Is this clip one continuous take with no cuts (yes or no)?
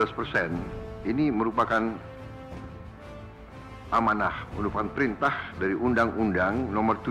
no